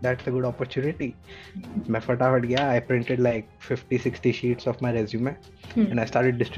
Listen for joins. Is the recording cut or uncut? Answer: uncut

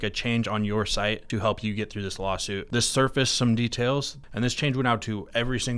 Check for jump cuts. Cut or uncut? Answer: cut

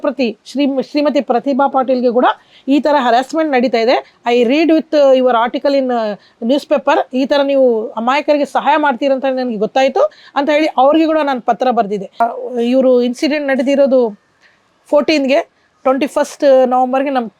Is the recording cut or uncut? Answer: cut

